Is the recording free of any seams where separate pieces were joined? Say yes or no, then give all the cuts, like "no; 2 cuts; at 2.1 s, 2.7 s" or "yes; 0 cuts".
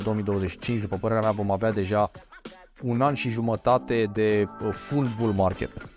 yes; 0 cuts